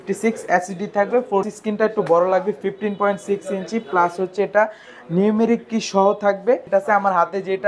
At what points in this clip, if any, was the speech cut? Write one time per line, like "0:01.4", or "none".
0:01.5
0:06.6